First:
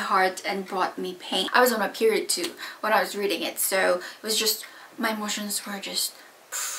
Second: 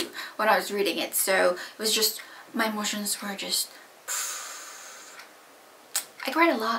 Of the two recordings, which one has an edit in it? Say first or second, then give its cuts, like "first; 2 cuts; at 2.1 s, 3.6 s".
first; 1 cut; at 1.5 s